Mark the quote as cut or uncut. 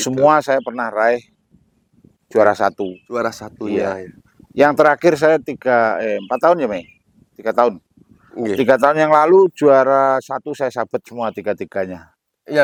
uncut